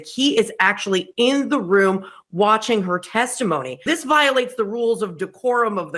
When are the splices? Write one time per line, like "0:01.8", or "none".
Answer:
0:03.9